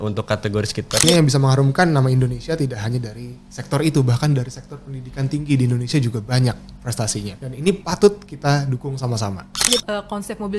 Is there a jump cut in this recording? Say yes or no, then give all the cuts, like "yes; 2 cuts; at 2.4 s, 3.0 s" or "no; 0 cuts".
yes; 3 cuts; at 1.0 s, 7.7 s, 9.7 s